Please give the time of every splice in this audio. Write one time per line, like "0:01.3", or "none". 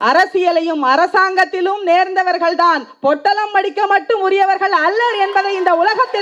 none